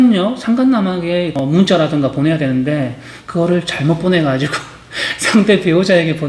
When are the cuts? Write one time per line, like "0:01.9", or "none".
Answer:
0:01.4